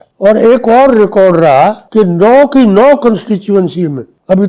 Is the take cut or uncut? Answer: uncut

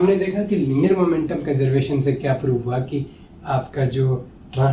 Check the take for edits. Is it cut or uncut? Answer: uncut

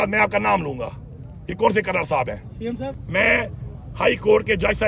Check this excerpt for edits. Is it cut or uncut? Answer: cut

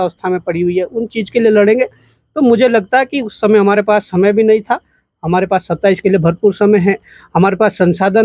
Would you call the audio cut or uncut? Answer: uncut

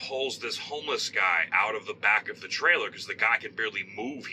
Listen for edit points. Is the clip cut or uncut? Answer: uncut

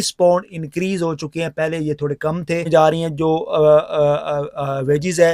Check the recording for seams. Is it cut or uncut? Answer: cut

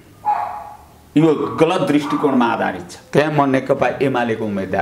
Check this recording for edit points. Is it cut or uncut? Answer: cut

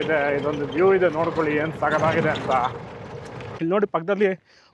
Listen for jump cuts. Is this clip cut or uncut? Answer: cut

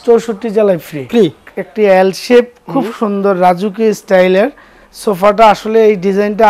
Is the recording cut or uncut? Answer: cut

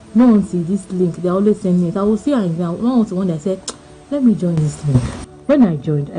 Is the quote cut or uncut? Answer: cut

